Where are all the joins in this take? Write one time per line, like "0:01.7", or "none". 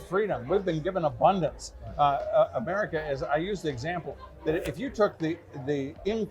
none